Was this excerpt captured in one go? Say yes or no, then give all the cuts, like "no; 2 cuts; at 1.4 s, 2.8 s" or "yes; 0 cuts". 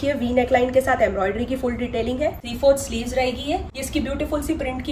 no; 2 cuts; at 2.5 s, 3.8 s